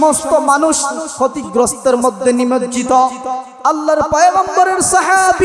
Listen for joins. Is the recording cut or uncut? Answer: cut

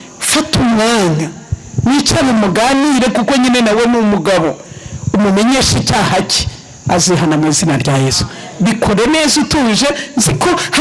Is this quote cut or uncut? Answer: uncut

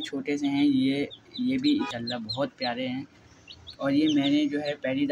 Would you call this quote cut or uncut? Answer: cut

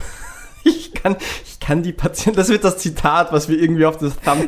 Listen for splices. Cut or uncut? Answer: uncut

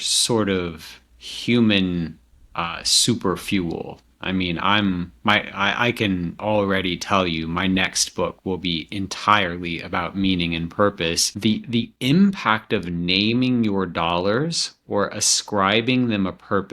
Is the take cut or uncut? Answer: cut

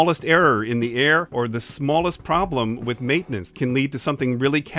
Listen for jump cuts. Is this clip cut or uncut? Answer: cut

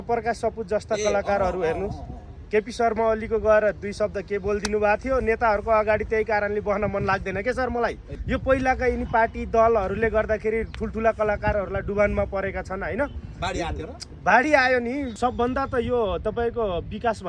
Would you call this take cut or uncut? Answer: cut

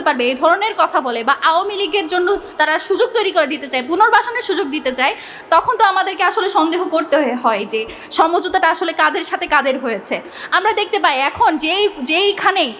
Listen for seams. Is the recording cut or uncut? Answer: uncut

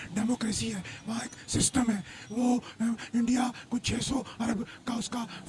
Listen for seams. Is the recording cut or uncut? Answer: uncut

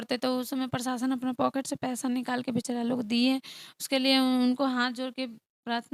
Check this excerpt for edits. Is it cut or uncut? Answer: uncut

